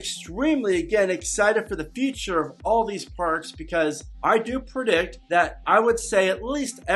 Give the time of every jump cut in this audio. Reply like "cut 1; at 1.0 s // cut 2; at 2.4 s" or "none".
cut 1; at 4.1 s // cut 2; at 5.2 s